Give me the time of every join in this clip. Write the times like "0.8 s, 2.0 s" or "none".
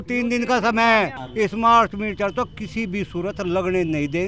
1.2 s